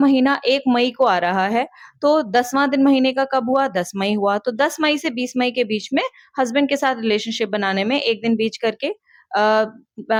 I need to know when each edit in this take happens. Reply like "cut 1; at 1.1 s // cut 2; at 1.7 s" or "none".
none